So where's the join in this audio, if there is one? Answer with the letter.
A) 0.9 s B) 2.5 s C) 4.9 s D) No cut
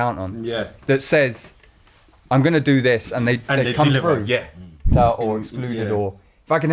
C